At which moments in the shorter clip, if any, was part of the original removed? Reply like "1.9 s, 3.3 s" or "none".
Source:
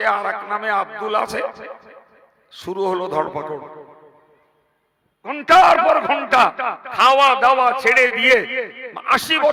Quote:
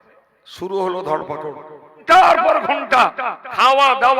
2.0 s